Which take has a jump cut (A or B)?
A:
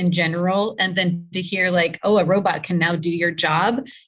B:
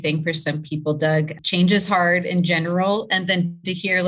B